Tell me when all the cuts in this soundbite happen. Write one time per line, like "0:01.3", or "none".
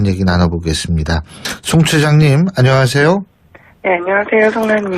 0:01.8